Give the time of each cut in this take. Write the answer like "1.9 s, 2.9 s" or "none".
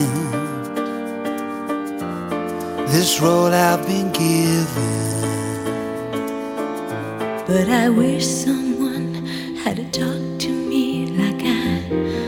none